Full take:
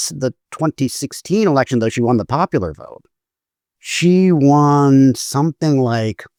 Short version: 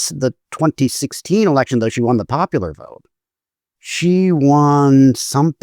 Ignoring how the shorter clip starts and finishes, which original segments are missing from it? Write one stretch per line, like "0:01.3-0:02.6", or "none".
none

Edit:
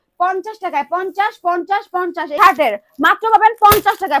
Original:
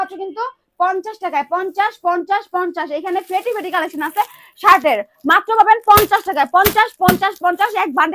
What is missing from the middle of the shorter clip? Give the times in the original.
0:02.9-0:04.6

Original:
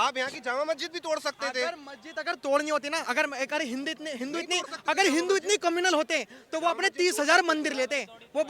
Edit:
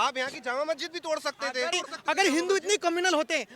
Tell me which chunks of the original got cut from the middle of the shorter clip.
0:01.7-0:04.5

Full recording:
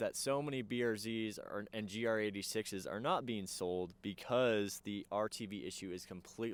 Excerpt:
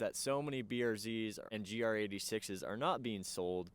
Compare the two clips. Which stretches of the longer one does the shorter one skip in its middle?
0:01.4-0:01.7

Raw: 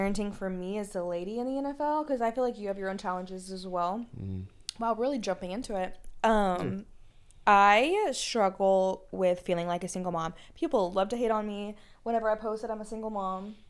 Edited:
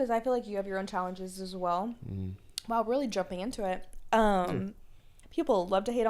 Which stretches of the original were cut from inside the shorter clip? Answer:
0:07.2-0:10.4

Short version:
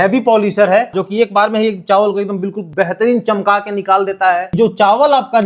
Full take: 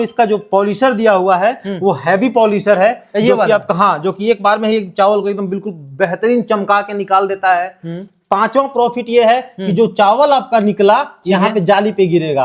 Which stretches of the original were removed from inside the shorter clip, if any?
0:03.0-0:04.0
0:05.7-0:05.8
0:07.7-0:09.7

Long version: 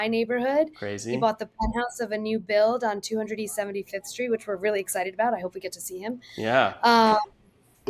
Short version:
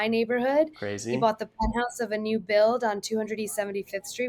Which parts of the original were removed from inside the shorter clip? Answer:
none

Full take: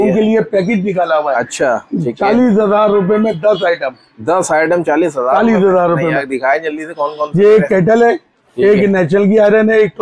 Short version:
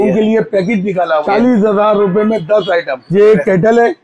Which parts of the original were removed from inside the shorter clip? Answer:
0:01.2-0:02.2
0:03.9-0:07.2

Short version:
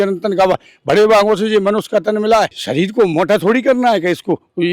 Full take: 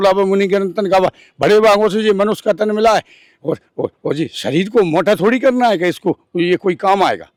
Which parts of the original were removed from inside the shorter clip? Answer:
0:03.1-0:04.4

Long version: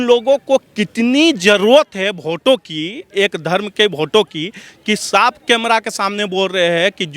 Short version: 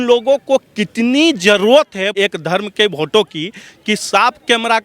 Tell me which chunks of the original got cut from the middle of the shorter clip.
0:02.1-0:03.1

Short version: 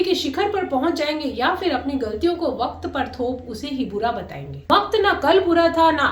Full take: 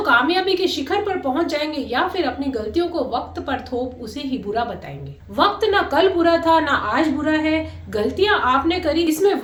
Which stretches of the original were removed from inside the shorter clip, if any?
0:05.0-0:05.1

